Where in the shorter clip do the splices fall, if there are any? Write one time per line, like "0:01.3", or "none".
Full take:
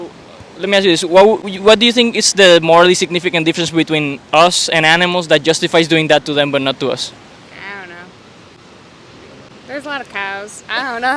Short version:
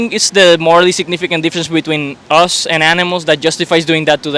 none